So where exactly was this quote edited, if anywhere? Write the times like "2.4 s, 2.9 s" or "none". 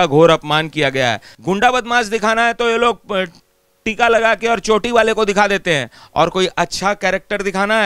1.3 s